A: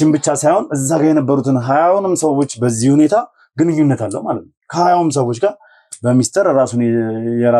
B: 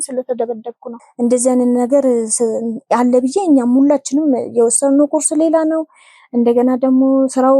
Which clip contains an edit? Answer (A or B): B